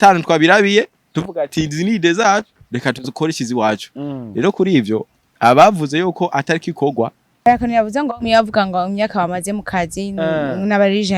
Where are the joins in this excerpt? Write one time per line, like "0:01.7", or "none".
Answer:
0:07.5